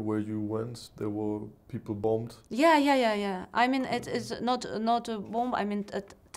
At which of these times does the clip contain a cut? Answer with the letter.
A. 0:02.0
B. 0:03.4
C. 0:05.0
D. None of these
A